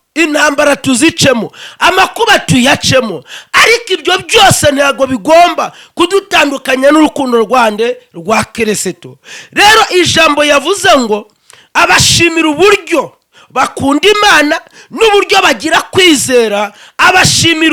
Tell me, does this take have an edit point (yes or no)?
no